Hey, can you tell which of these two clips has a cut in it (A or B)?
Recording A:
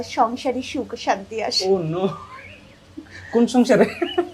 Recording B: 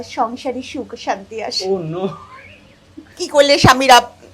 B